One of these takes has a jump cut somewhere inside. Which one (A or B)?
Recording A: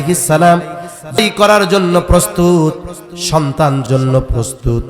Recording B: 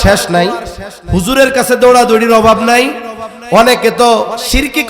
A